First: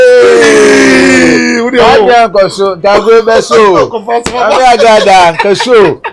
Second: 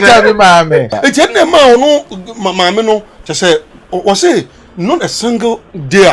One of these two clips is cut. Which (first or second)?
second